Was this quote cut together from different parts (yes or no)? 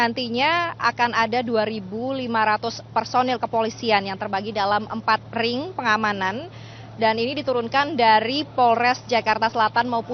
no